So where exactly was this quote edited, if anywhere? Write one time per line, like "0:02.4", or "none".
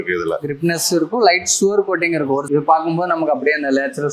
0:02.5